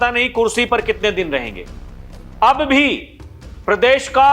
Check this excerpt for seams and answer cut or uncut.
uncut